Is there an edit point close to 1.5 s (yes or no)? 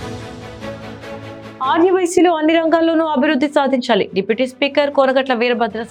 no